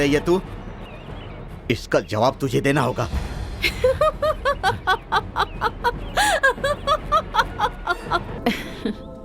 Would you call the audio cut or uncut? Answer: cut